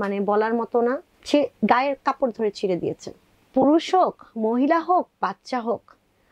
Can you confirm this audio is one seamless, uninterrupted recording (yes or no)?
no